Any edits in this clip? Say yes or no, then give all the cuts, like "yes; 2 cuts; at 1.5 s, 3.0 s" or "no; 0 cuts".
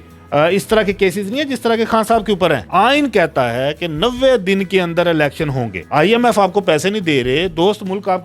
yes; 2 cuts; at 2.6 s, 5.7 s